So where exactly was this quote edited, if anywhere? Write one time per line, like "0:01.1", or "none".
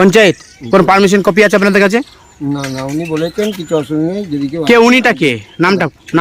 none